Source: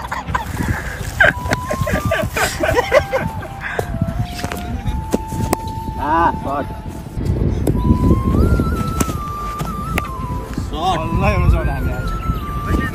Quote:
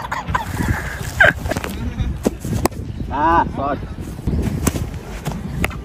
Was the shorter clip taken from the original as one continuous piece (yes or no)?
no